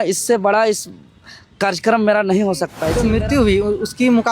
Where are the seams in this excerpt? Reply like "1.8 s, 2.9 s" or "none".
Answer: 2.9 s